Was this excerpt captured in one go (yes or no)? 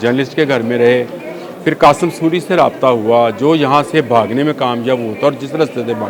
yes